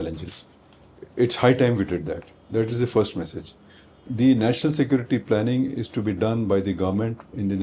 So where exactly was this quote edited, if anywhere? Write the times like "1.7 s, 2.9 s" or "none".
4.1 s